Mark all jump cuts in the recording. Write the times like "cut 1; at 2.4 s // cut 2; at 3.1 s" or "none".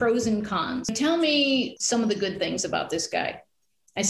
cut 1; at 0.9 s // cut 2; at 1.8 s